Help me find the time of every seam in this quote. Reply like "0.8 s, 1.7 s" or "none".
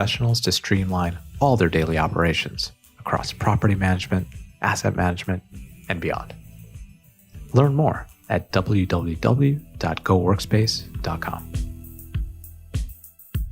11.4 s